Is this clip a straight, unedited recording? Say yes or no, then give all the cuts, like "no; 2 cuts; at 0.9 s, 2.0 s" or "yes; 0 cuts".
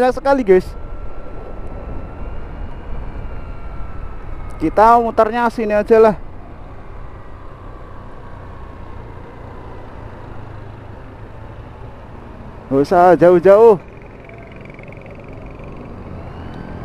yes; 0 cuts